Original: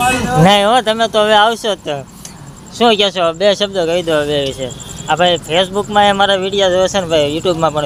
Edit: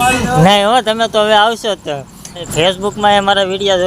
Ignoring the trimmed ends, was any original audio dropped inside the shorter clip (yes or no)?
yes